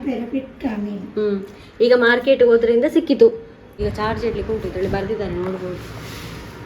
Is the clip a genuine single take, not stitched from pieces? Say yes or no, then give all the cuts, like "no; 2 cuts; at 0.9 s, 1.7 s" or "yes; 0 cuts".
no; 1 cut; at 3.6 s